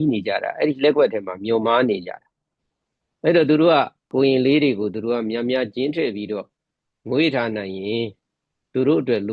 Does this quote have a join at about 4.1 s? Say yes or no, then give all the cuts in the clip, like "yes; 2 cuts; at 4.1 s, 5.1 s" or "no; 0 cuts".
yes; 1 cut; at 4.1 s